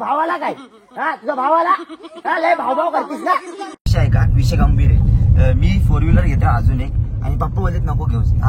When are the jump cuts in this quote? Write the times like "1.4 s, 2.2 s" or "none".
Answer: 3.9 s